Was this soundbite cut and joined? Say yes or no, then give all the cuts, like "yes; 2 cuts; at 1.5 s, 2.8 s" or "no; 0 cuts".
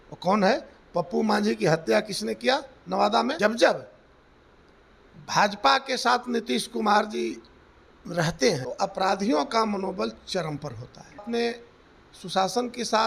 yes; 3 cuts; at 3.4 s, 8.6 s, 11.2 s